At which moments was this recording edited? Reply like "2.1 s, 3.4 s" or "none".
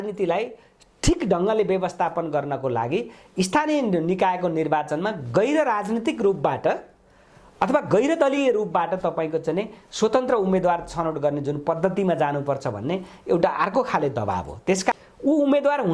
15.0 s